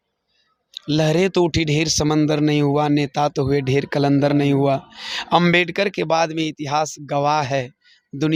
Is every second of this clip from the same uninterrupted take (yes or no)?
yes